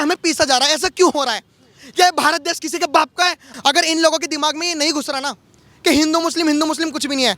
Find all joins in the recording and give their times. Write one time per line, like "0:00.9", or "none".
0:03.4